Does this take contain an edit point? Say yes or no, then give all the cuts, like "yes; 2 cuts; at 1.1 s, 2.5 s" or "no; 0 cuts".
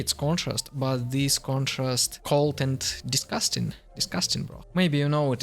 yes; 2 cuts; at 2.1 s, 4.6 s